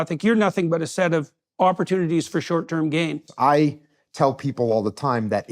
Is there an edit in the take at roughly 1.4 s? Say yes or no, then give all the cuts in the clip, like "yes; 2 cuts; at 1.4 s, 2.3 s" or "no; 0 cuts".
no; 1 cut; at 3.3 s